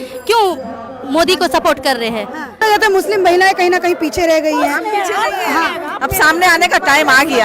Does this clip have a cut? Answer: yes; 1 cut; at 2.6 s

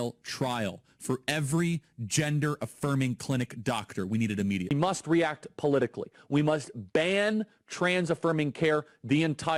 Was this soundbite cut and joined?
no; 0 cuts

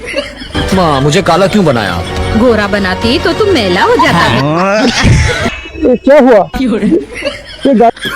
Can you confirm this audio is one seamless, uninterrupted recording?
no; 1 cut; at 5.5 s

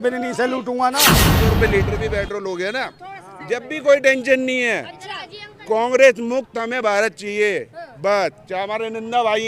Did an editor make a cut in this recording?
yes; 1 cut; at 1.2 s

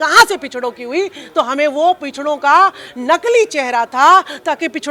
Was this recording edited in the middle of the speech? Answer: no; 0 cuts

